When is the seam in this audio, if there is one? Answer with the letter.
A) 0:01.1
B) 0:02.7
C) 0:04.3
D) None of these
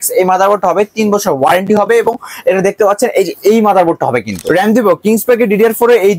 C